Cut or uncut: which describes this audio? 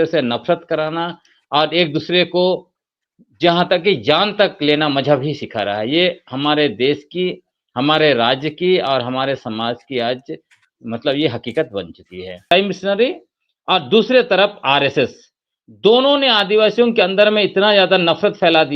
cut